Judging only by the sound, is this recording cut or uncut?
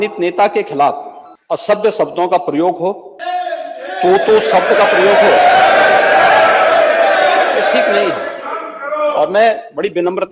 cut